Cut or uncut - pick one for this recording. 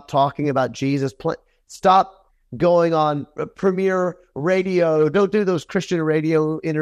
uncut